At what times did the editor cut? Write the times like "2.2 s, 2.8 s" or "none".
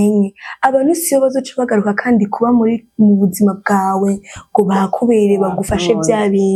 none